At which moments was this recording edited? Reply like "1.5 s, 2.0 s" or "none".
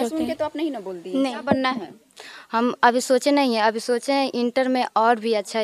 1.3 s

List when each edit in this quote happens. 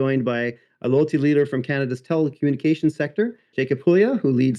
3.6 s

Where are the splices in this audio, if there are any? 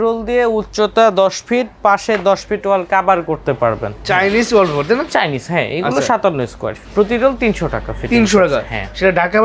4.0 s, 6.8 s

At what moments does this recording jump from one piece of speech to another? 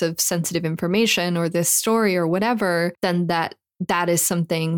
3.0 s

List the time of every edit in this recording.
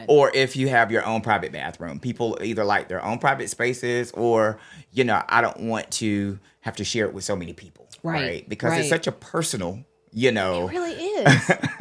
none

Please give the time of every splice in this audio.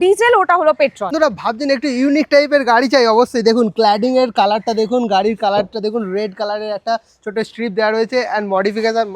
1.1 s

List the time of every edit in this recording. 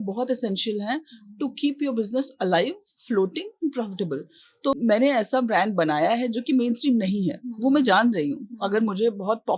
4.7 s

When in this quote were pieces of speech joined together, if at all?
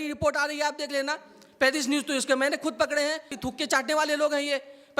3.4 s

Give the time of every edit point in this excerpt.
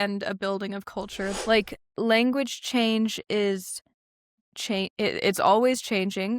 1.3 s

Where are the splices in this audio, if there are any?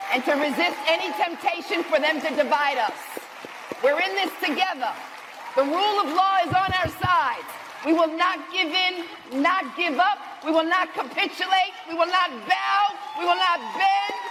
none

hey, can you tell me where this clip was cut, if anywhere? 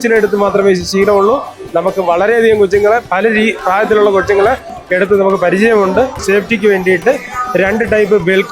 6.2 s

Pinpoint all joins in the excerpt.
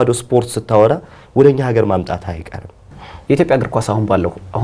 2.9 s

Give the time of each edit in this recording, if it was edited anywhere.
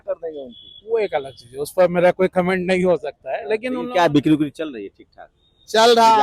3.8 s

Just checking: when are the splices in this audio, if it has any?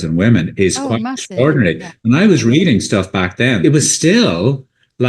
3.6 s

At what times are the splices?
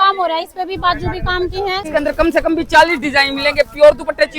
1.8 s

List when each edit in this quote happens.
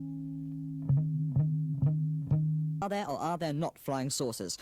2.8 s

